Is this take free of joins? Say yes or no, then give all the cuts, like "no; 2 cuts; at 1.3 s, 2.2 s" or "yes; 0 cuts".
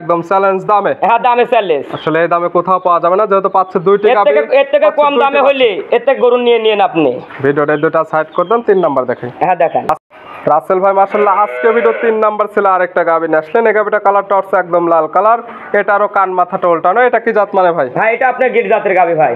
yes; 0 cuts